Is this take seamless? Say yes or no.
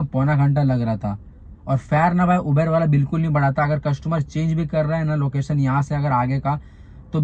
yes